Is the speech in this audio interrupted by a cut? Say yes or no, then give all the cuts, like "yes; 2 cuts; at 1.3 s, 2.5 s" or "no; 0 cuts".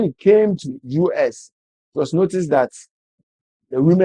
no; 0 cuts